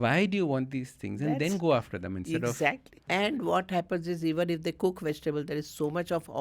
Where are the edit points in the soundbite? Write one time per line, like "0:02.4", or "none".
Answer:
0:03.0

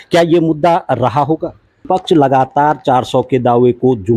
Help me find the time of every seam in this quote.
0:01.9

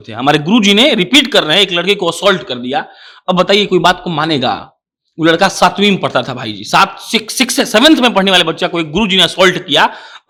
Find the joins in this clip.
none

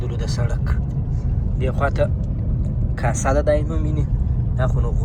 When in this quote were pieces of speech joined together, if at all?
none

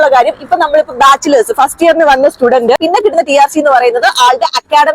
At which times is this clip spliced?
0:02.8

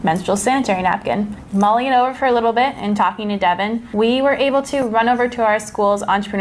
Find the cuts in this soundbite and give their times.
0:01.4
0:03.8

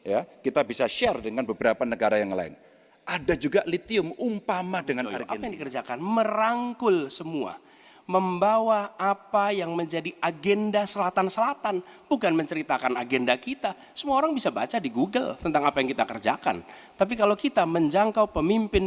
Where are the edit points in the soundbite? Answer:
0:05.2

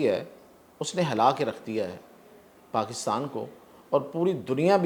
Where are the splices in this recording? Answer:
none

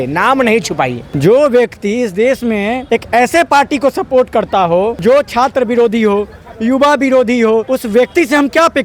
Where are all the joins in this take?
0:01.1
0:02.8
0:05.0
0:07.7

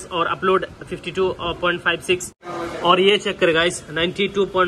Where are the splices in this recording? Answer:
0:02.4

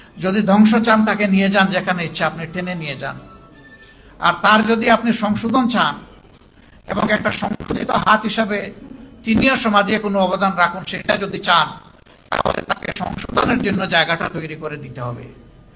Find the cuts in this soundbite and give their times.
none

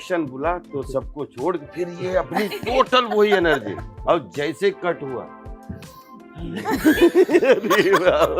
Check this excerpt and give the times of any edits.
none

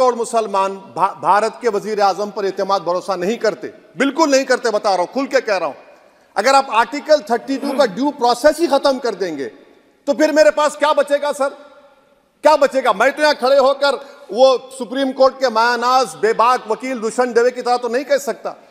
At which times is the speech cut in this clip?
none

